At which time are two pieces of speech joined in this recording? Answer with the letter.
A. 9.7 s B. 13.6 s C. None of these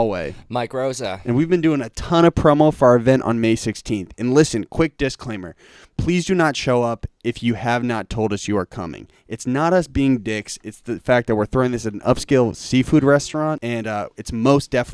B